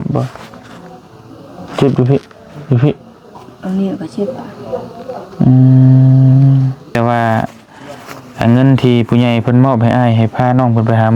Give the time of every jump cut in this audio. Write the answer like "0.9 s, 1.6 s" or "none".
6.9 s